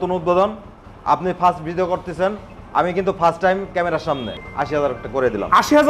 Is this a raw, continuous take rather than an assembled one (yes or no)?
no